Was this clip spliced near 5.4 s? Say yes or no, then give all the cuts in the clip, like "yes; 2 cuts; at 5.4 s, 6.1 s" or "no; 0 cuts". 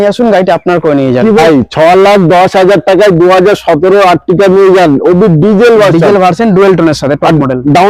no; 1 cut; at 1.4 s